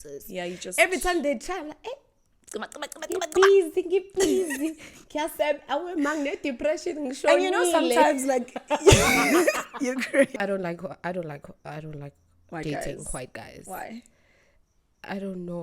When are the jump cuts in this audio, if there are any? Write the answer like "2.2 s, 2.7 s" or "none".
10.4 s